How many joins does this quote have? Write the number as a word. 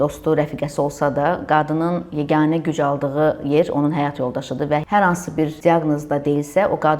two